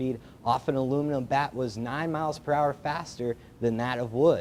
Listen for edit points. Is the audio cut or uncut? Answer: uncut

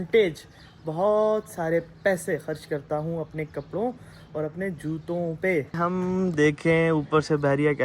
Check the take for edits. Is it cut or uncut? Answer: cut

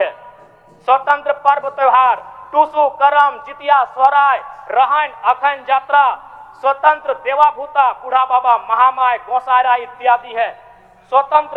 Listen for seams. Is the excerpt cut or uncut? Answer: uncut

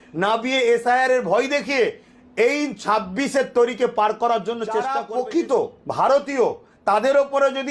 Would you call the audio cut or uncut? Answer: cut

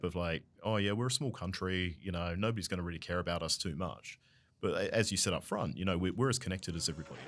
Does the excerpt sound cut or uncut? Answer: uncut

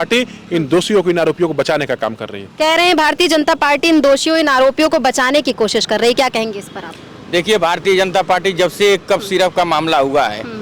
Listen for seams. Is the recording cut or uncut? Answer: uncut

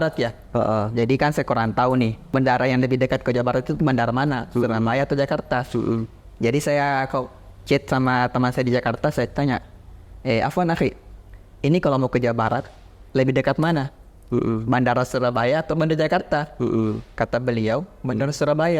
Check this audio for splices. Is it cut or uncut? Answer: cut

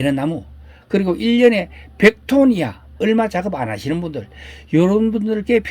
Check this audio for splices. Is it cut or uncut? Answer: cut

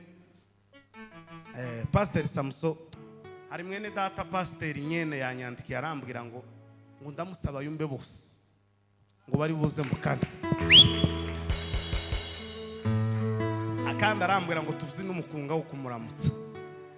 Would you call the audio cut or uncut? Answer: cut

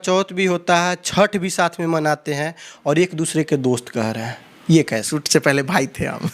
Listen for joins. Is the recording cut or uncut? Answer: cut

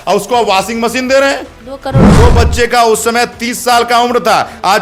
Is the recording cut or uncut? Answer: cut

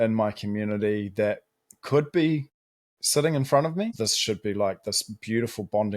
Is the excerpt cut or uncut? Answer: cut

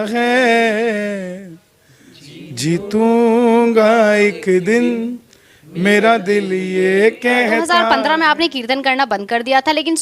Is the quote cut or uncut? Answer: cut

